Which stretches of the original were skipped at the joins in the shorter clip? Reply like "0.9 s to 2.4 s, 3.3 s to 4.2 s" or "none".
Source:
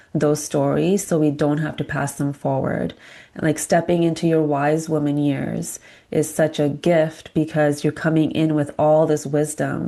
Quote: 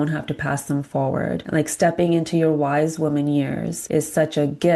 2.9 s to 3.3 s, 5.6 s to 6.0 s